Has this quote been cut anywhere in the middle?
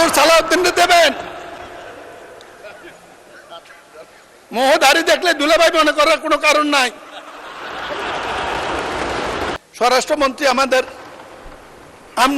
yes; 1 cut; at 9.6 s

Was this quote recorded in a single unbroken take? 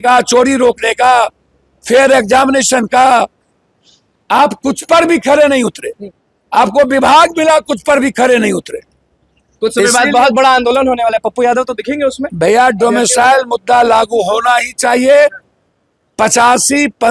yes; 0 cuts

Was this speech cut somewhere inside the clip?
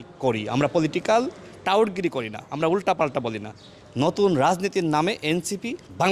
yes; 1 cut; at 3.8 s

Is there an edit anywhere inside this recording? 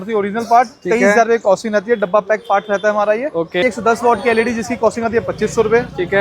yes; 1 cut; at 3.6 s

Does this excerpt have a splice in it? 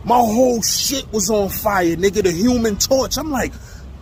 no; 0 cuts

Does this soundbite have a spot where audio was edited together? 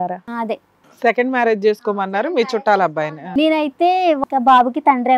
yes; 2 cuts; at 3.2 s, 4.2 s

